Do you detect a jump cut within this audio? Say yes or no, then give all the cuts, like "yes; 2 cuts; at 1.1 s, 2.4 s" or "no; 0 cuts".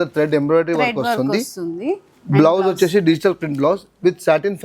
no; 0 cuts